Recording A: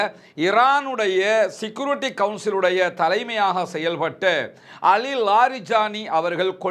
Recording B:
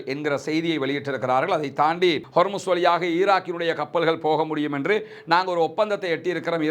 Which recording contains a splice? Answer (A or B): B